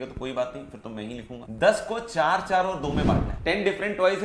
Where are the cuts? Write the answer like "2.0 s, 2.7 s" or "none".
1.4 s, 3.3 s